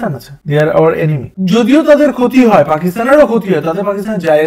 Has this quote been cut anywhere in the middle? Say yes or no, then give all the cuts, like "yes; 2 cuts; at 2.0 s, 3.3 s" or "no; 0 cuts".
yes; 1 cut; at 1.3 s